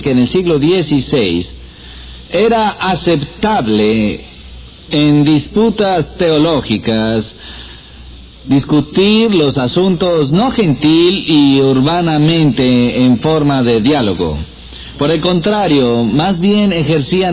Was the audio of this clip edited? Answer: no; 0 cuts

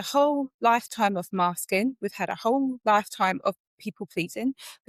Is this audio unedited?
yes; 0 cuts

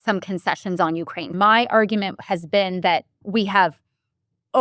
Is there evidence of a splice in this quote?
yes; 2 cuts; at 1.3 s, 3.2 s

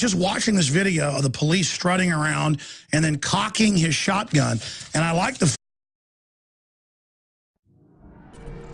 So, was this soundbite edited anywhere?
no; 0 cuts

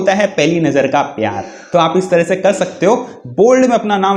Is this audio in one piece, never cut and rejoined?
yes; 0 cuts

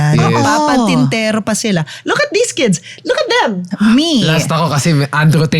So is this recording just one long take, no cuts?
no; 1 cut; at 3.6 s

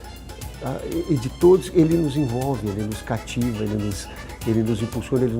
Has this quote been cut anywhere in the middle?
no; 0 cuts

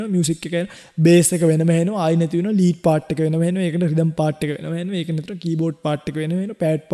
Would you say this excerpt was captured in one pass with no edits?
yes; 0 cuts

